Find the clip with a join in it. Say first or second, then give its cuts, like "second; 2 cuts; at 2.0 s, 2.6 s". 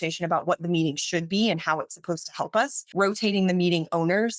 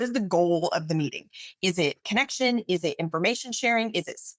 first; 1 cut; at 2.8 s